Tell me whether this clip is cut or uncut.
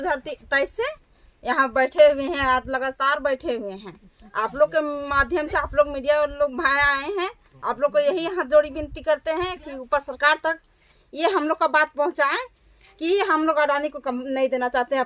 uncut